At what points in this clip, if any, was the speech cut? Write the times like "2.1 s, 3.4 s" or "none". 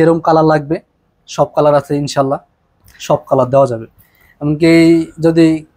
none